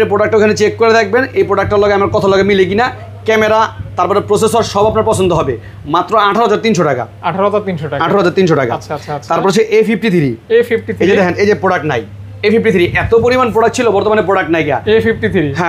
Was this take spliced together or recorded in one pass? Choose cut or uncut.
uncut